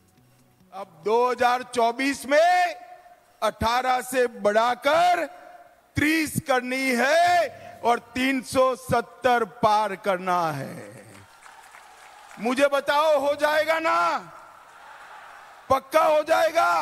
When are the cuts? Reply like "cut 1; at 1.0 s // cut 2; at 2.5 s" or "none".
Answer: cut 1; at 0.9 s